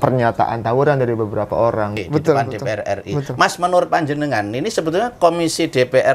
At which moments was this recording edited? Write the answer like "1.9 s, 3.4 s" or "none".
2.0 s